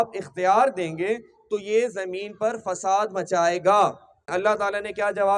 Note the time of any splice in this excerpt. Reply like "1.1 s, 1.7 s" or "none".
4.3 s